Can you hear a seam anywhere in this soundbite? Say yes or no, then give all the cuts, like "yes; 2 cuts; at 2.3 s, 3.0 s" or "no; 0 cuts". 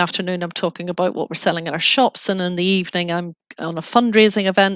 no; 0 cuts